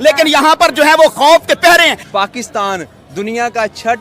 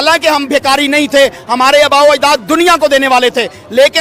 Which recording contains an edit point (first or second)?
first